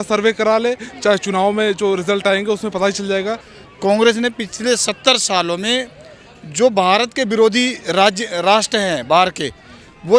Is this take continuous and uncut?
no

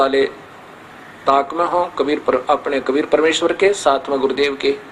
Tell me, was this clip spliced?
no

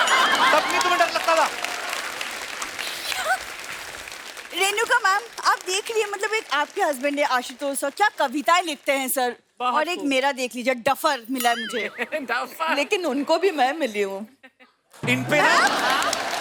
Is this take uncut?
yes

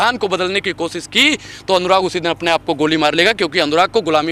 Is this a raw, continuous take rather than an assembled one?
yes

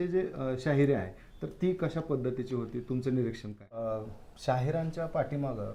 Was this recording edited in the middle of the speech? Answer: yes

